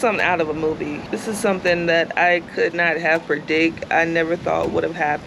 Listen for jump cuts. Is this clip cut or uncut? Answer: cut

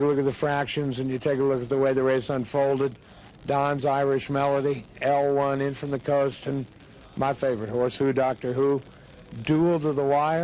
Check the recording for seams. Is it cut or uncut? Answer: uncut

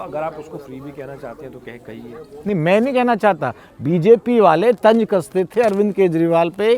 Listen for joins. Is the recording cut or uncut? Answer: uncut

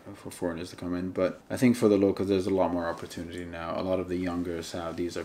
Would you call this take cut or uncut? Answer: cut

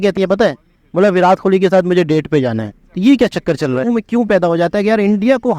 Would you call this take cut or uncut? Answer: cut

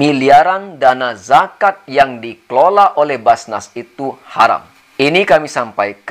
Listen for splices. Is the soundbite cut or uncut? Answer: cut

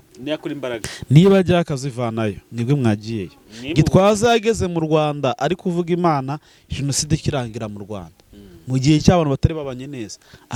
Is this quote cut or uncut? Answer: uncut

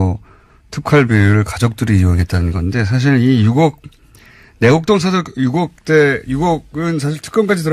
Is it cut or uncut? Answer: uncut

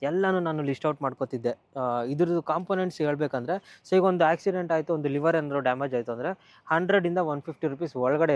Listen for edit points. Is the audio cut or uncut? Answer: uncut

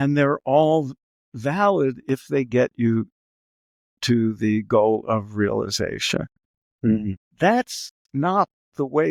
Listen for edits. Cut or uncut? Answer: uncut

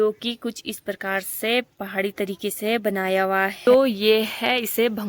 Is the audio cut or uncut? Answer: cut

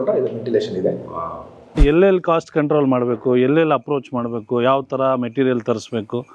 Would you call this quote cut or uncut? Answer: cut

